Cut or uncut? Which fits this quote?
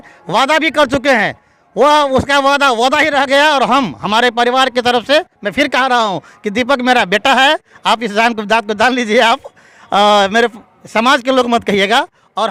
uncut